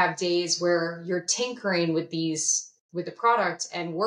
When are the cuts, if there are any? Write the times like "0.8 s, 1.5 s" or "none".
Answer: none